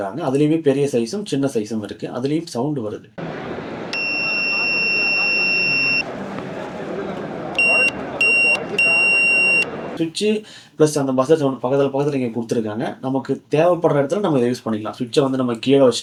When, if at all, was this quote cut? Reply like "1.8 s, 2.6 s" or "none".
none